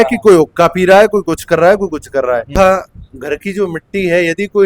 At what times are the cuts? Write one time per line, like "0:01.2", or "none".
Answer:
0:02.5